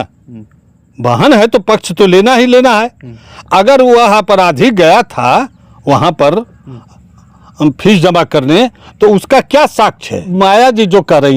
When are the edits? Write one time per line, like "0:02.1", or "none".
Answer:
0:10.2